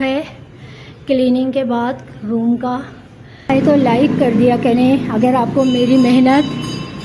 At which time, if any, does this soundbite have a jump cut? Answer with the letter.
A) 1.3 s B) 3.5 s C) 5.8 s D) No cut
B